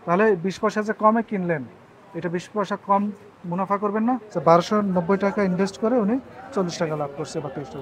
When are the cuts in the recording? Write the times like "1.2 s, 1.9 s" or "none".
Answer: 4.3 s